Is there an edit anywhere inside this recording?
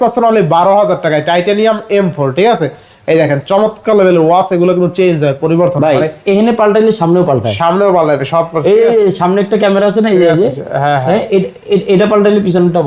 no; 0 cuts

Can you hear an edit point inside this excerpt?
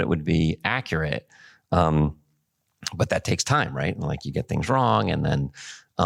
no; 0 cuts

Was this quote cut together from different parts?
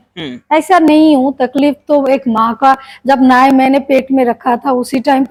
no; 0 cuts

